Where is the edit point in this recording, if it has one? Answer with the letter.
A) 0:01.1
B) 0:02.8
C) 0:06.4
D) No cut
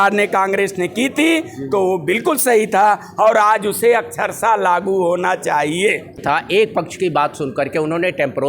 C